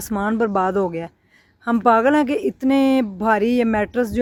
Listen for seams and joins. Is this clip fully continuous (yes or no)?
yes